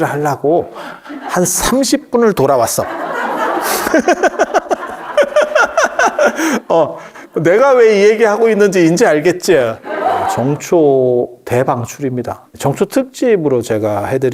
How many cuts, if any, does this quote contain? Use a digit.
2